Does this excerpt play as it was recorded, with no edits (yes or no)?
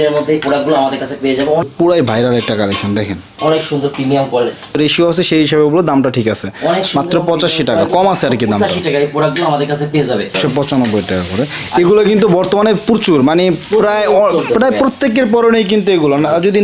no